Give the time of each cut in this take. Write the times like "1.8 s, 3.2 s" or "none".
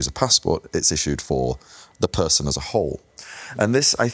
none

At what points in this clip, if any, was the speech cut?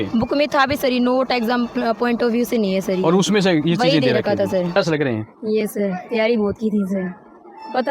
4.9 s

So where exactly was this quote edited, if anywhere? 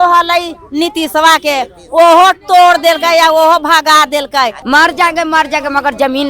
4.6 s

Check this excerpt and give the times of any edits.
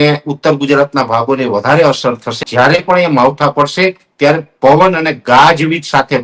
2.4 s

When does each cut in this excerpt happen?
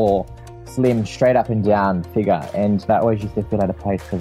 2.9 s

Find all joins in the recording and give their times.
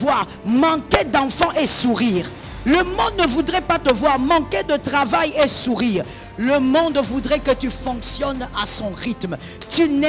none

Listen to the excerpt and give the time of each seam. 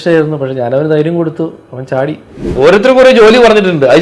2.5 s

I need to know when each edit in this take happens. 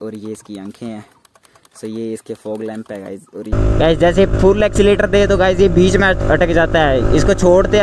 3.5 s

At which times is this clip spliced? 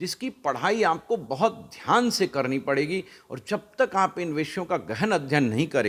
none

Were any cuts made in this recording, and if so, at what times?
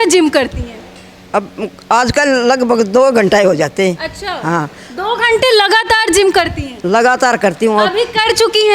none

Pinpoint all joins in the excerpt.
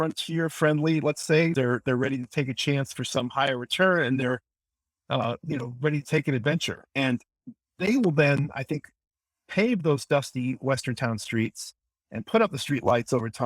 1.5 s

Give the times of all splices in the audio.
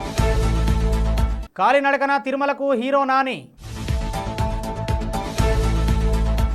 1.2 s

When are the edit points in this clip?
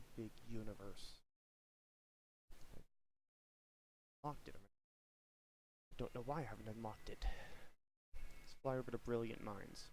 8.5 s

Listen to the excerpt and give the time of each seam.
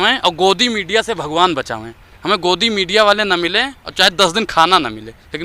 none

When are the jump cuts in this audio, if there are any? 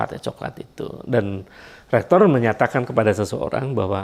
none

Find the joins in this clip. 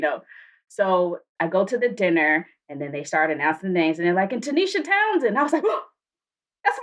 1.2 s

